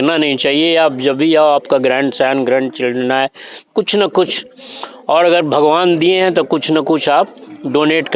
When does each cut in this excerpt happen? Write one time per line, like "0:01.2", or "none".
none